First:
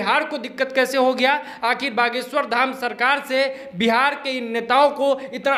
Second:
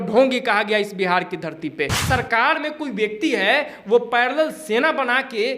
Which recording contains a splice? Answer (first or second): second